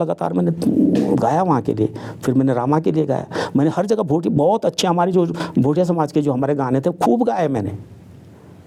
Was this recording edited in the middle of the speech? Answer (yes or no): no